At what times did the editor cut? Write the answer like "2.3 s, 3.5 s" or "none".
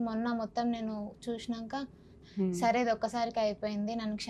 2.2 s